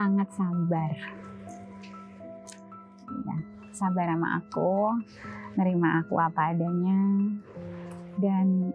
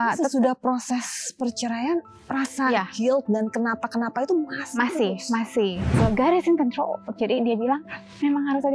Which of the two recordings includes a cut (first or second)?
second